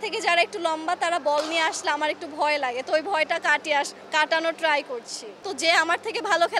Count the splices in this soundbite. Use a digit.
1